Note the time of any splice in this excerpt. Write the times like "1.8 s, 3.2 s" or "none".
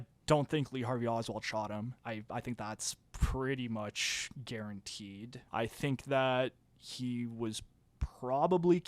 2.0 s, 5.3 s